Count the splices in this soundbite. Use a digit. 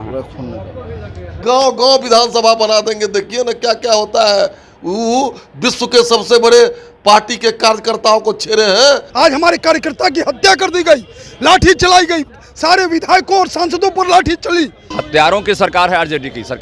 3